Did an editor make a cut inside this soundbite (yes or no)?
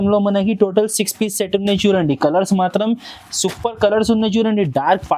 no